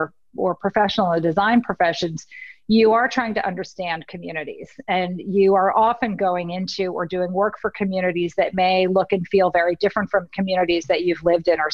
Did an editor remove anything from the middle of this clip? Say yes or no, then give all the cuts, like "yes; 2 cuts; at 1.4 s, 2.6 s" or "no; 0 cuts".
no; 0 cuts